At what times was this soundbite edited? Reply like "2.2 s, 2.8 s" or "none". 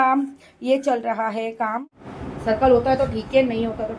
1.9 s